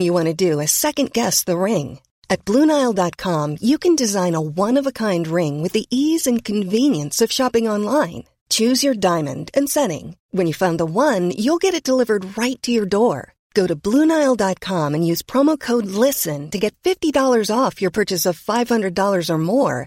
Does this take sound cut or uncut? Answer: uncut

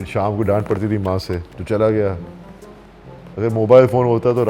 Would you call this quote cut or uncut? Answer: cut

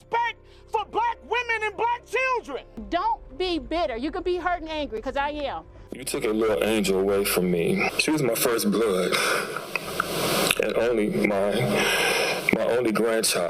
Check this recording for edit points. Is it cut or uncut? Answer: cut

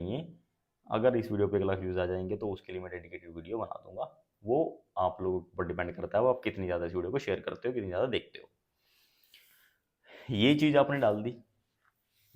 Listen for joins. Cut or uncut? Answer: uncut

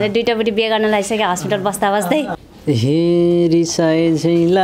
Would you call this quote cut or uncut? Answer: cut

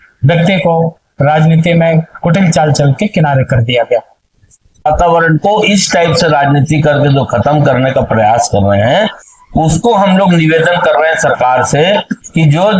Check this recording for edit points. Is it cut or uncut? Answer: cut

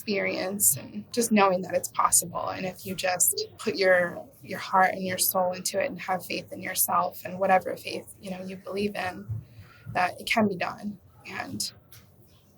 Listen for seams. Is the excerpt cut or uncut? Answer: cut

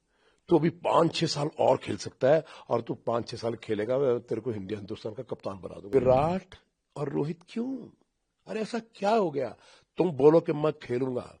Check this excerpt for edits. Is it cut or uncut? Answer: cut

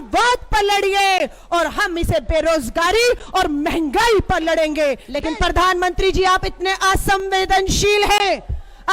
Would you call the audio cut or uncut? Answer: cut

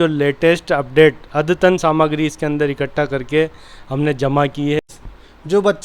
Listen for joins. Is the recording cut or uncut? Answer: cut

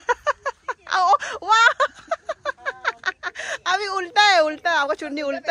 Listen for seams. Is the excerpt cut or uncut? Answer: uncut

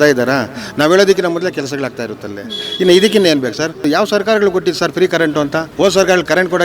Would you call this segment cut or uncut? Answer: cut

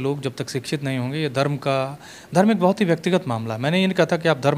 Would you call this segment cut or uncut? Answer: uncut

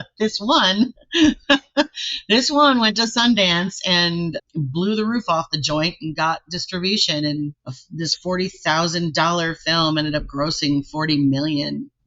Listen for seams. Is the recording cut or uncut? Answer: uncut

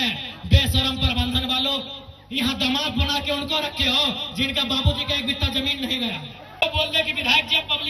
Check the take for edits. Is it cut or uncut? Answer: cut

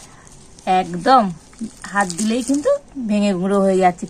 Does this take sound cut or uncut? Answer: uncut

